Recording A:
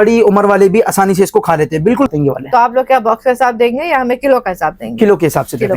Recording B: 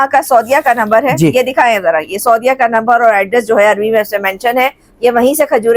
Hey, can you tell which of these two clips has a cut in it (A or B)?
A